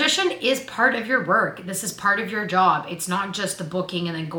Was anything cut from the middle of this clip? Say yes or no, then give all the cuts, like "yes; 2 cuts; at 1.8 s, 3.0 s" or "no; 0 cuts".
no; 0 cuts